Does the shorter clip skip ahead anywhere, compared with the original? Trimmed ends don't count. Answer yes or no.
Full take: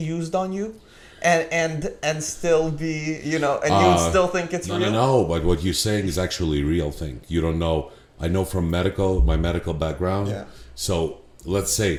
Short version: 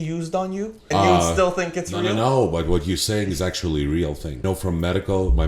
yes